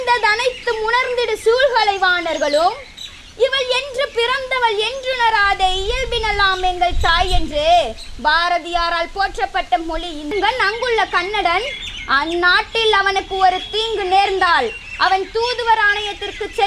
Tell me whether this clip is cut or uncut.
cut